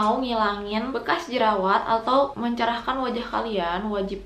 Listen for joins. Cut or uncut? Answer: cut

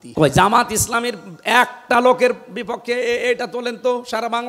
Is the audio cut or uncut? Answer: uncut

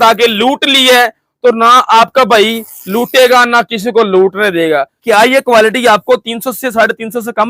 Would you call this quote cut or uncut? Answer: cut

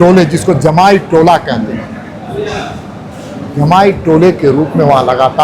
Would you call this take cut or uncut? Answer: uncut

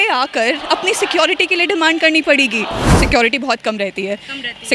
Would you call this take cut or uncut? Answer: cut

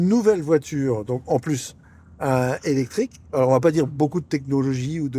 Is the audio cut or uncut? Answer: uncut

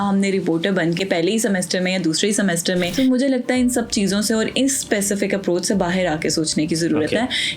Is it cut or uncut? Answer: cut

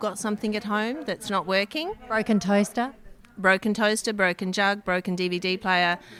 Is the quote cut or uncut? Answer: uncut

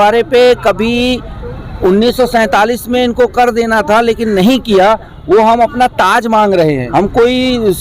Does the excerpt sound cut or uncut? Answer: cut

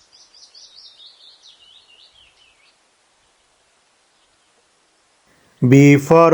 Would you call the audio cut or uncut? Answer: uncut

